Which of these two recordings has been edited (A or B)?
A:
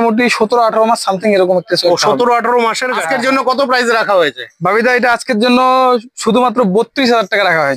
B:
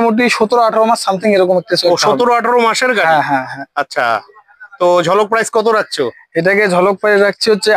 A